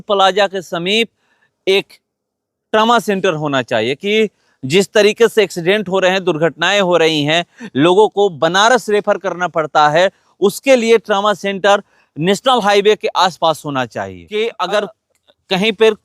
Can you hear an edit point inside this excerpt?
no; 0 cuts

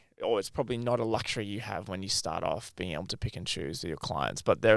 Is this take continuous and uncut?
yes; 0 cuts

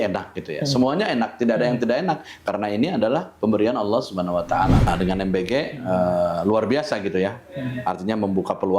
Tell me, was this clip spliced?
yes; 1 cut; at 4.9 s

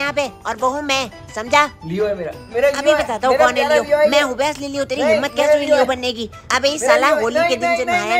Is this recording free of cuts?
yes; 0 cuts

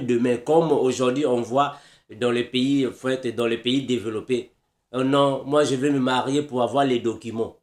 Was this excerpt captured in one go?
yes; 0 cuts

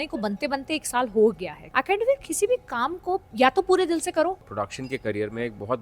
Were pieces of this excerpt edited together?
yes; 3 cuts; at 1.5 s, 3.3 s, 4.5 s

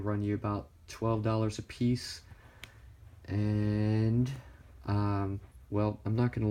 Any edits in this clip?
yes; 1 cut; at 3.4 s

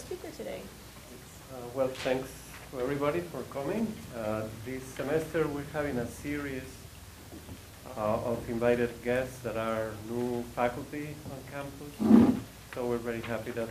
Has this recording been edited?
yes; 1 cut; at 10.4 s

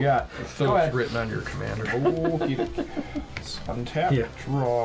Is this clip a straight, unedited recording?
yes; 0 cuts

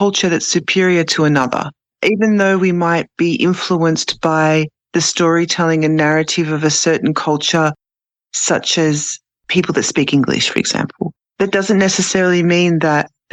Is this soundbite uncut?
yes; 0 cuts

